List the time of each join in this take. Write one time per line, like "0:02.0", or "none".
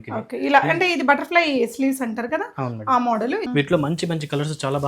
0:03.5